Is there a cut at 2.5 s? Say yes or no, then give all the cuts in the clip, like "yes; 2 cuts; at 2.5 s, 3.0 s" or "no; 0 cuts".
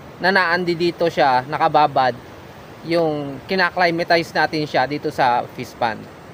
no; 0 cuts